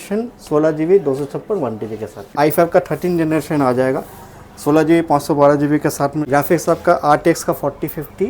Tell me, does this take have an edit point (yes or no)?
yes